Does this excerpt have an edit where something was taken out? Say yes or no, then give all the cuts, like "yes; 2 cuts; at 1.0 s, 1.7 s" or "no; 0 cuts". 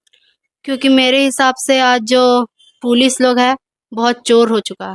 no; 0 cuts